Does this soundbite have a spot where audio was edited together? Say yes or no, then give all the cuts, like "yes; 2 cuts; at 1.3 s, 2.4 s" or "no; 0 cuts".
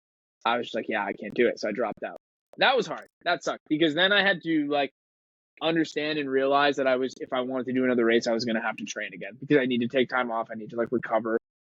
no; 0 cuts